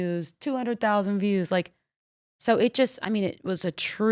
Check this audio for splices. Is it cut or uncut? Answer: uncut